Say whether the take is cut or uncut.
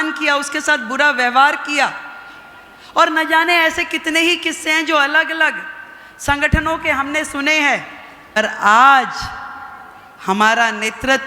cut